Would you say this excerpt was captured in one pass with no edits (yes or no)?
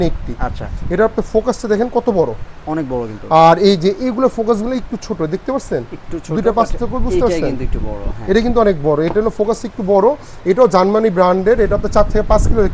yes